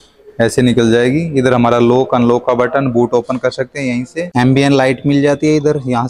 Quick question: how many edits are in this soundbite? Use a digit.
1